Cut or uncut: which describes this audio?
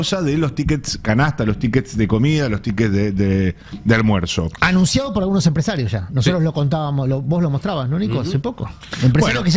uncut